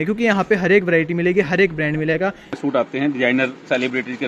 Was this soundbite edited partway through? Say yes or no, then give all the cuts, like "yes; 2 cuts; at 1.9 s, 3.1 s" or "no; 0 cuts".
yes; 1 cut; at 2.5 s